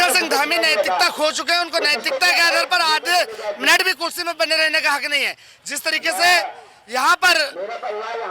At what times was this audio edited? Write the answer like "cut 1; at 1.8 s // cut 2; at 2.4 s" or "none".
none

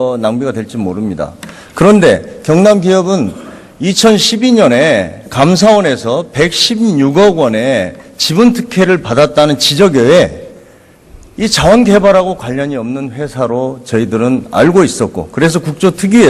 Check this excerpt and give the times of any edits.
cut 1; at 8.0 s

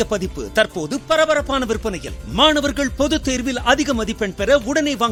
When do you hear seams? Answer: none

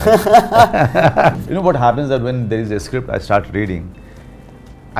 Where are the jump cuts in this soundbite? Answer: cut 1; at 1.3 s

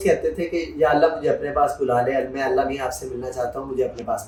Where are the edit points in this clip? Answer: none

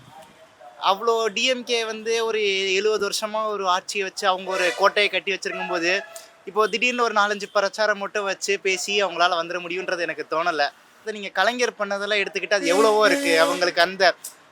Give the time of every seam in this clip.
cut 1; at 11.1 s

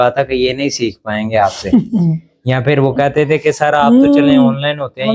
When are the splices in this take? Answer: none

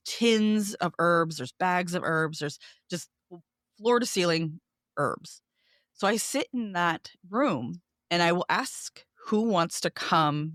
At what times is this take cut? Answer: none

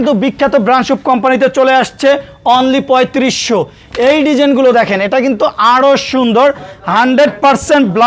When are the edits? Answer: none

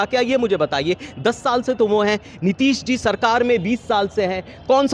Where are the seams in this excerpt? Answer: none

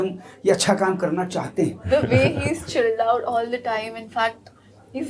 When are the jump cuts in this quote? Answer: cut 1; at 1.8 s

